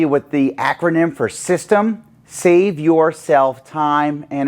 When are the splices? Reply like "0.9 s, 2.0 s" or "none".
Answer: none